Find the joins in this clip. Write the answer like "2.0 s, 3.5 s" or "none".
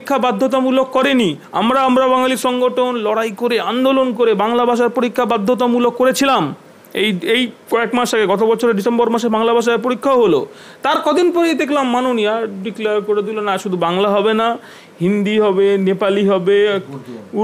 none